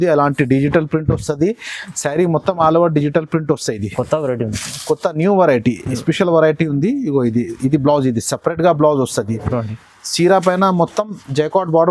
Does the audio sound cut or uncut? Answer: uncut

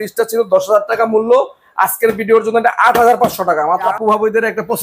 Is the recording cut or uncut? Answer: cut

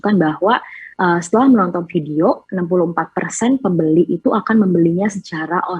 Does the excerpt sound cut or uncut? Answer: uncut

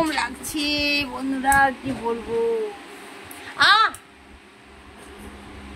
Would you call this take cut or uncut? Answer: uncut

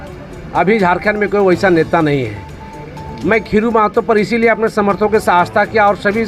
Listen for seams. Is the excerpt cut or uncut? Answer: uncut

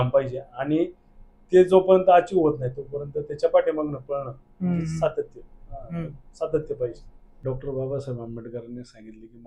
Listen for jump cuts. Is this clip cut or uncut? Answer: cut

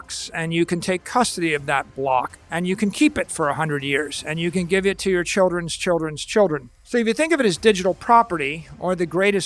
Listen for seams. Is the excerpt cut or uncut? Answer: cut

